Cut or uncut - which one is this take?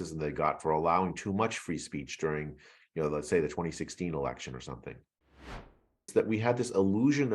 cut